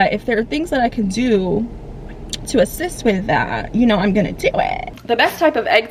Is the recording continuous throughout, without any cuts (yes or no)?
no